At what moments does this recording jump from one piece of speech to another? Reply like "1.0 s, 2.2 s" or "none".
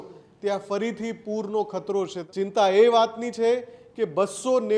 2.2 s